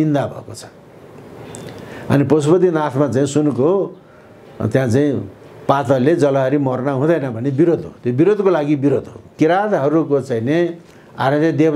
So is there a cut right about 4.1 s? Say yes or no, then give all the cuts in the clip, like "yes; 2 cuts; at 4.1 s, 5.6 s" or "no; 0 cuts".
no; 1 cut; at 9.3 s